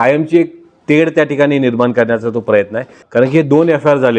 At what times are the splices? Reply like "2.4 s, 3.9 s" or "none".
3.0 s